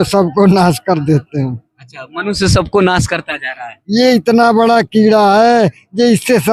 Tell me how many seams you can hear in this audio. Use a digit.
0